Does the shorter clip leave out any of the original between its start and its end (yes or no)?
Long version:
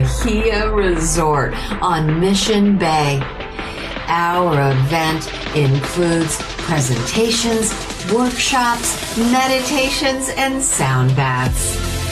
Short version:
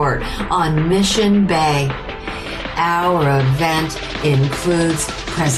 no